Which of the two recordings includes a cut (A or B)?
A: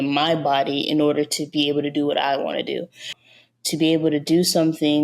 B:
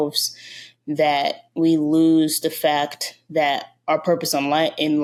A